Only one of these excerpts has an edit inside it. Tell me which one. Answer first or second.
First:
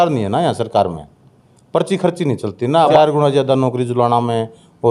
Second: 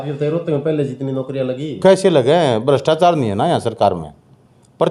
first